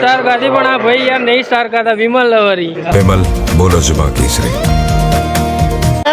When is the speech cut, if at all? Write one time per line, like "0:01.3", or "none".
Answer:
0:02.9